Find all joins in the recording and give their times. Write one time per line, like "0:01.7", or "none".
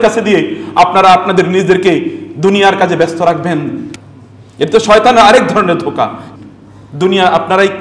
0:03.9
0:06.2